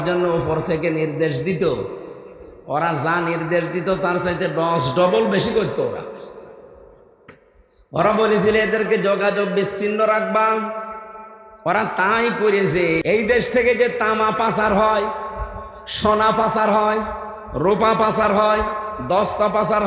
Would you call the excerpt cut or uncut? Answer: cut